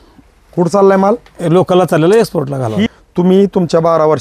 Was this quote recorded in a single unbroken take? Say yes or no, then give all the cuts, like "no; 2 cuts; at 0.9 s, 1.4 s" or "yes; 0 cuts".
no; 1 cut; at 2.9 s